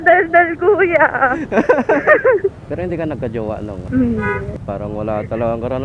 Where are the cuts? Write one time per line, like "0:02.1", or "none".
0:02.6
0:03.8